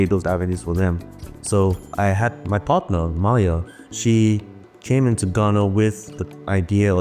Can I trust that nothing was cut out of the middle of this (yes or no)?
yes